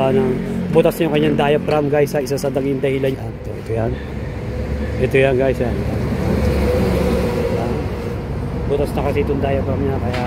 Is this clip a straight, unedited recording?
no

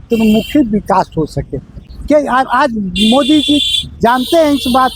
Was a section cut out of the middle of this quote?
no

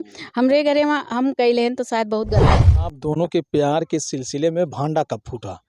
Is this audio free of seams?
no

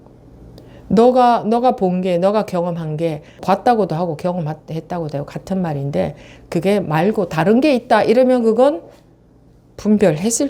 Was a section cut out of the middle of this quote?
yes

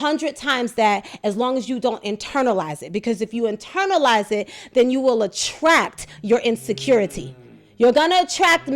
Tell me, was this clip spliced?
no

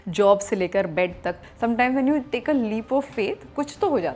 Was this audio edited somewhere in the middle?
yes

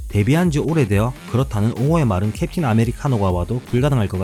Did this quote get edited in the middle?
no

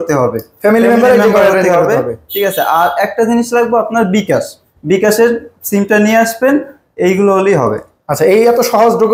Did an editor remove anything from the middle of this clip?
no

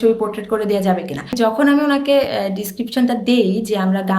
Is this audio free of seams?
no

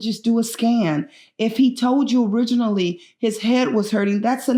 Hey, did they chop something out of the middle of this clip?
no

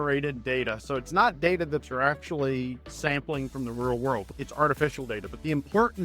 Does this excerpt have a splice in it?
yes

